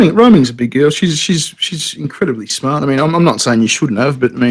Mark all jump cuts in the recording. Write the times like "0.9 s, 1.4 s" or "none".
1.6 s